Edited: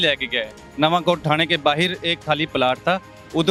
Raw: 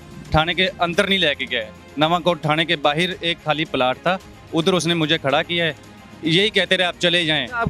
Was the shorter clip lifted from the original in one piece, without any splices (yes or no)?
yes